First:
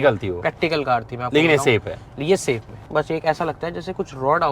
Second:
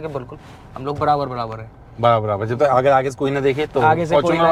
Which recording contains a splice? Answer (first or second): first